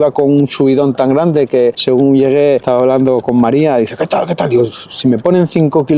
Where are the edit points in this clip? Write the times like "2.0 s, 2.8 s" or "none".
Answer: 1.8 s, 3.1 s